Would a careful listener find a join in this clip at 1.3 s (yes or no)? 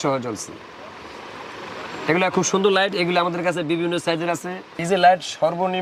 no